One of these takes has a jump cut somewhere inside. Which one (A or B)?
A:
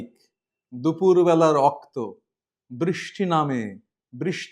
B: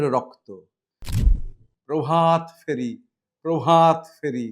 B